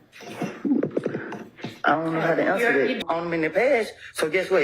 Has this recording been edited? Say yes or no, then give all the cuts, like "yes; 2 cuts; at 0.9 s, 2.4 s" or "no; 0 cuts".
yes; 1 cut; at 3.0 s